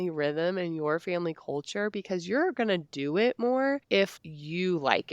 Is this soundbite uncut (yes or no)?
no